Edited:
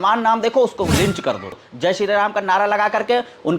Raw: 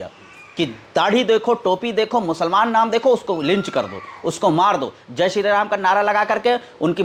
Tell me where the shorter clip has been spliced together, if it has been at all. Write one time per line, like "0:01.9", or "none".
0:01.6

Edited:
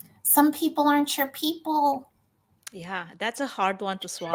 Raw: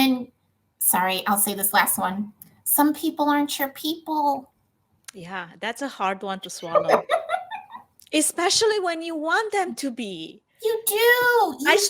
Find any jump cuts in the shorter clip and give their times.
none

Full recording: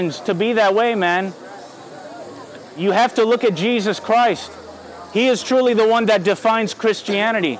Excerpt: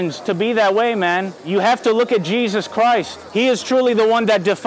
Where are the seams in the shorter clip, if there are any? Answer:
0:01.4
0:03.2

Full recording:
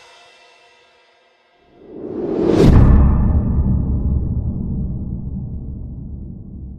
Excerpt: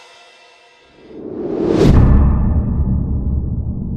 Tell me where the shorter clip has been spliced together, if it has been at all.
0:00.9

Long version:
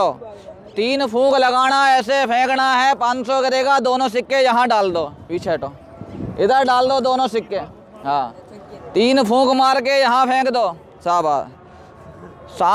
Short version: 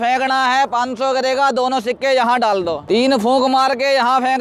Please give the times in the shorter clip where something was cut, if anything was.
0:02.8

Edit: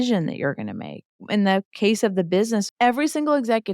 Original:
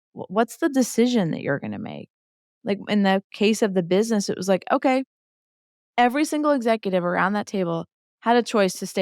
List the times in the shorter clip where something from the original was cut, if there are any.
0:01.2
0:02.7

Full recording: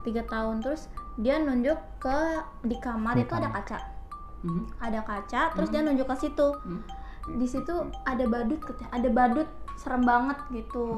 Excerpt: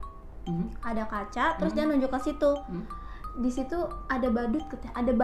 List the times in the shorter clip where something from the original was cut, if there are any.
none

